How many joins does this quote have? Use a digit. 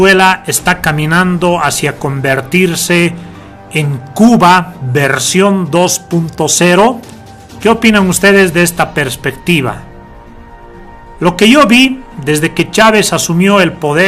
0